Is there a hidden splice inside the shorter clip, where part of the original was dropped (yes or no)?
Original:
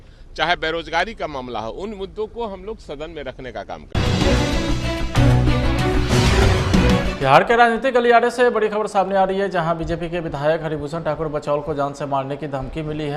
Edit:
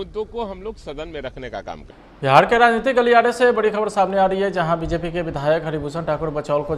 yes